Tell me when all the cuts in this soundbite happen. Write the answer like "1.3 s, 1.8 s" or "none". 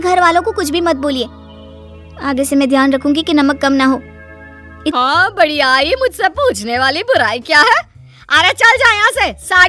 4.9 s